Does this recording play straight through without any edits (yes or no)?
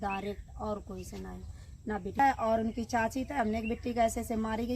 no